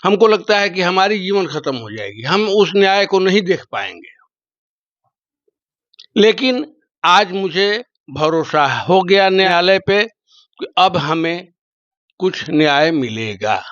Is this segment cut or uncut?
cut